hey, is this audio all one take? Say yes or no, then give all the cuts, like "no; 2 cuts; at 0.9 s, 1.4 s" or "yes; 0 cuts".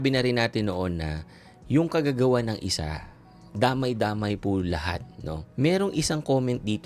no; 1 cut; at 5.4 s